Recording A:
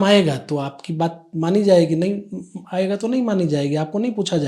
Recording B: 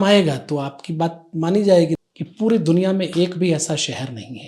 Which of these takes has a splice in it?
B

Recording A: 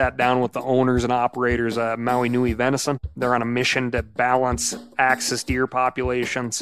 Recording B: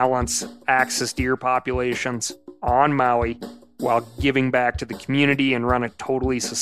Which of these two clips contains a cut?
A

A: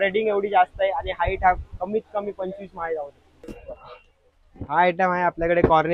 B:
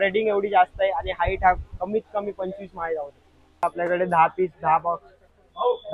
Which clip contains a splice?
B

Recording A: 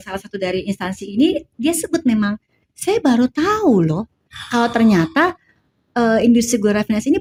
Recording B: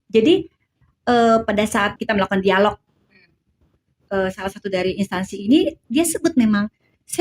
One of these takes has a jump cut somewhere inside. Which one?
B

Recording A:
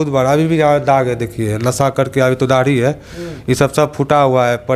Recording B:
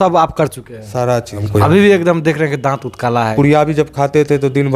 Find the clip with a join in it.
B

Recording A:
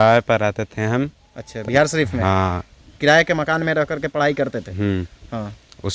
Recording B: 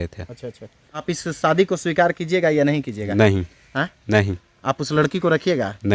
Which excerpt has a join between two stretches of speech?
B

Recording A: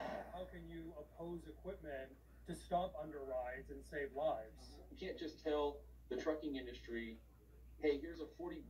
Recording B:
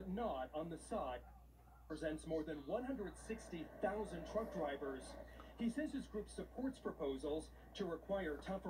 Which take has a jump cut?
B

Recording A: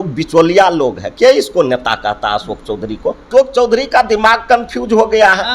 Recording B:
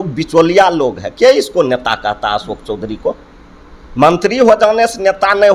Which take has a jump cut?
A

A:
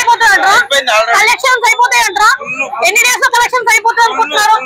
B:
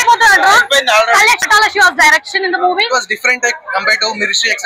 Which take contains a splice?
B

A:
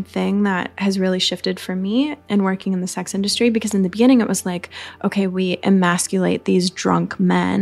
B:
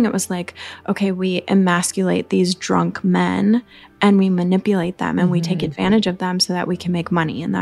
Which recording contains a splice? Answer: A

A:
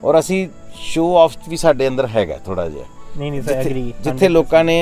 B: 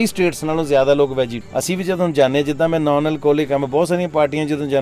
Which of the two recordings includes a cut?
B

